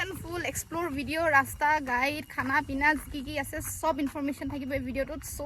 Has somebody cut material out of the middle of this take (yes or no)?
no